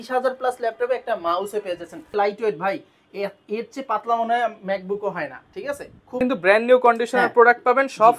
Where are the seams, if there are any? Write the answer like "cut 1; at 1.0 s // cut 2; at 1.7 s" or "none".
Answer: cut 1; at 2.1 s // cut 2; at 6.2 s

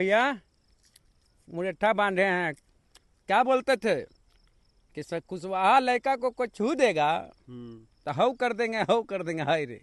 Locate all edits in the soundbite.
none

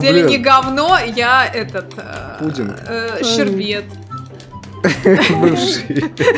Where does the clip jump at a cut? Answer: none

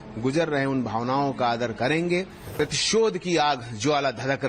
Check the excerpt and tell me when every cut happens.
cut 1; at 2.4 s

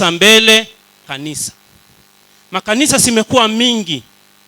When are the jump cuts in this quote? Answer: cut 1; at 1.1 s

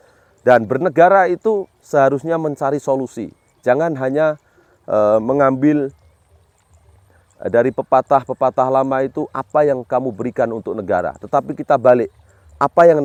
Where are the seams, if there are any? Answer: none

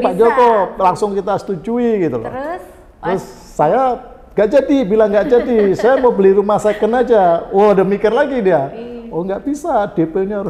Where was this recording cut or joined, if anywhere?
none

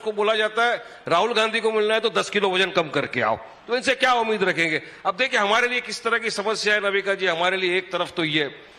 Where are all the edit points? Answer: none

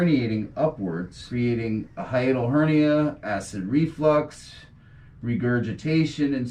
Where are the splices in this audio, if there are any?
cut 1; at 1.2 s

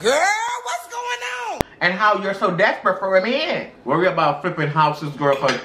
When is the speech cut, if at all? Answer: cut 1; at 3.7 s

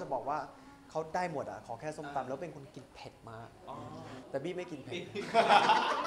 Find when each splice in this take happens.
cut 1; at 4.2 s

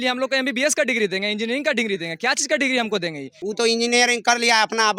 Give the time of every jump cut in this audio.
cut 1; at 3.3 s

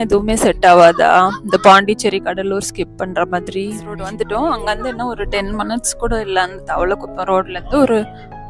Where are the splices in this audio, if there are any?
cut 1; at 4.0 s

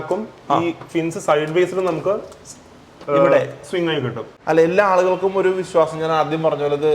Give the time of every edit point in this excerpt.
cut 1; at 4.3 s

